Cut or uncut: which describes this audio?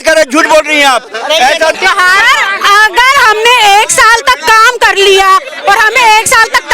cut